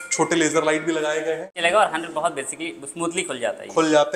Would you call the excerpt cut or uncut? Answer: cut